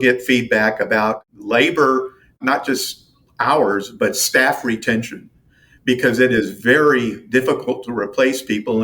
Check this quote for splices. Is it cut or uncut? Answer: cut